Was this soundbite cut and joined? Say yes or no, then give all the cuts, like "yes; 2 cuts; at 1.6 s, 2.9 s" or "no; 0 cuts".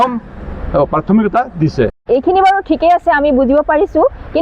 yes; 1 cut; at 2.0 s